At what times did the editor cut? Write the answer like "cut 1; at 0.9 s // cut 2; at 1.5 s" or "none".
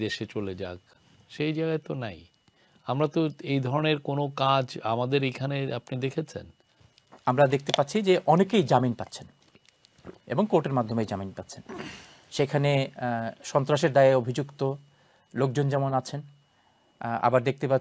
none